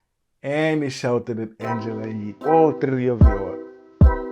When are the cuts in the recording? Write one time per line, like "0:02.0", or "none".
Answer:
0:03.2

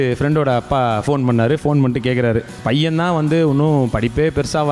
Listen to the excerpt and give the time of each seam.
0:02.6

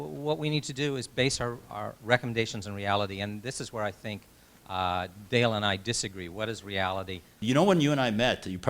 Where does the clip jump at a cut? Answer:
0:07.4

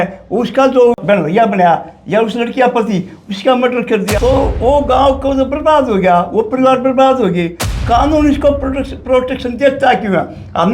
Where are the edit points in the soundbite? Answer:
0:01.0
0:04.1

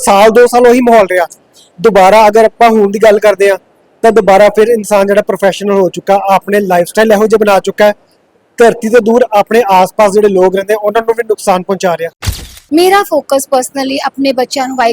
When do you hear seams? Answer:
0:12.4

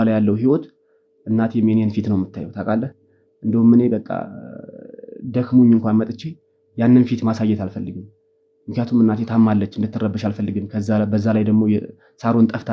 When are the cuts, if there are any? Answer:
none

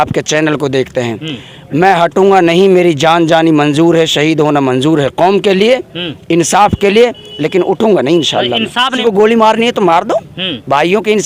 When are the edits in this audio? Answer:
0:09.0

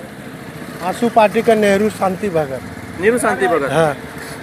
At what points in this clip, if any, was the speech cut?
none

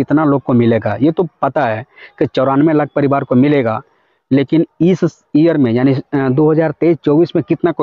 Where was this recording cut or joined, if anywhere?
none

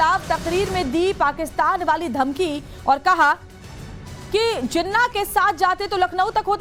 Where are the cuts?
none

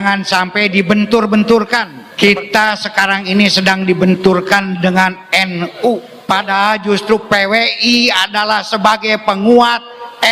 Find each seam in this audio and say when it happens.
0:02.0
0:06.1

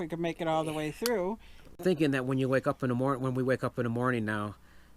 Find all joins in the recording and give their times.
0:01.8

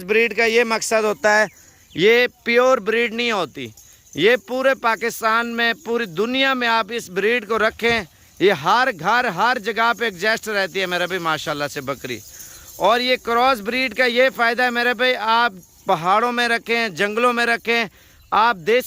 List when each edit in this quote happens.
none

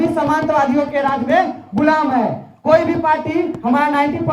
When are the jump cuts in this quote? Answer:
none

